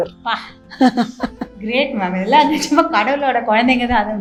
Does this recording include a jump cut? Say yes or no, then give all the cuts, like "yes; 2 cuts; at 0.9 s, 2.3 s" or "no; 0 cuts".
no; 0 cuts